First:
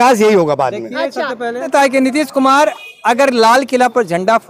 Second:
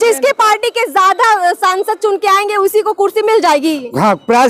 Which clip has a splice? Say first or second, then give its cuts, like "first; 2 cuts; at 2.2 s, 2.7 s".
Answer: first; 1 cut; at 1.7 s